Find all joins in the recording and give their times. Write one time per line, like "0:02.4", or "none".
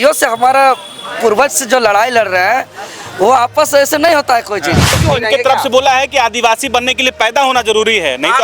0:05.0